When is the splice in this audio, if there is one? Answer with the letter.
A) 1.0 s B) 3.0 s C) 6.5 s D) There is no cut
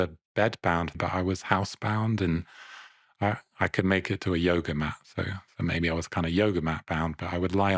A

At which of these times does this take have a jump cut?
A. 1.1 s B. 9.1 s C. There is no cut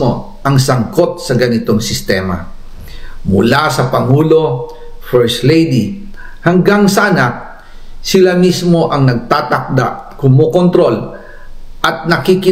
A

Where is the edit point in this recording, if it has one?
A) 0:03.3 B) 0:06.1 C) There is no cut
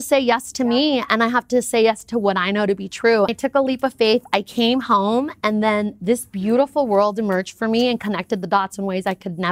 A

